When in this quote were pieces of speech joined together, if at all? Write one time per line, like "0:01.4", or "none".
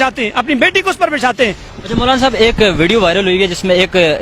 0:01.6